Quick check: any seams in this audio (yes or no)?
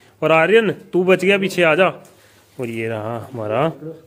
no